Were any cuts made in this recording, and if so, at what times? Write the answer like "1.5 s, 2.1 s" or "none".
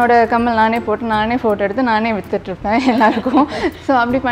none